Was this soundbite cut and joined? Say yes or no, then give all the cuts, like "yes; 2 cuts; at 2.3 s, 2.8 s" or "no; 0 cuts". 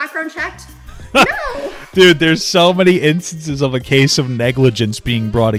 no; 0 cuts